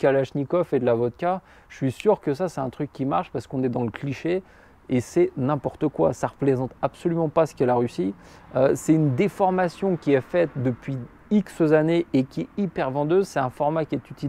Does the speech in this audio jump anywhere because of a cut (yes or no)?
no